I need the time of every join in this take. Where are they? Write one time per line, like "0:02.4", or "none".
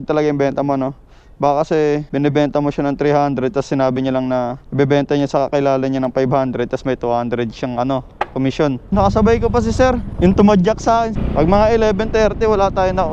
0:02.1
0:04.6
0:08.9
0:11.1